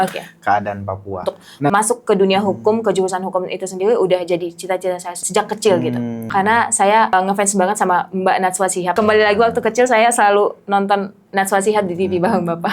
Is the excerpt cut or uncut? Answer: cut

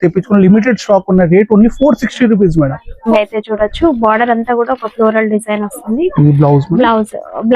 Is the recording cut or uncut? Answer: cut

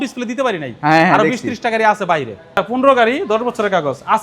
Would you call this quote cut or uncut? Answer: cut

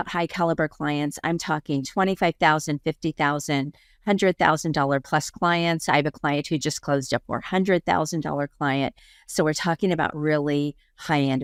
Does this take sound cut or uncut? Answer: uncut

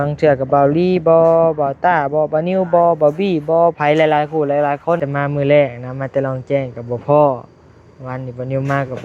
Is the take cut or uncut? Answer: cut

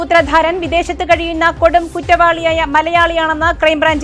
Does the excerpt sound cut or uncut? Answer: uncut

